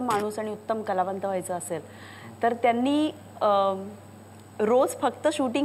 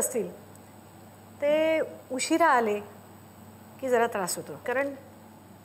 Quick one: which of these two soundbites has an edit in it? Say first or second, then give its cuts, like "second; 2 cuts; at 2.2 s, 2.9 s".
second; 1 cut; at 4.6 s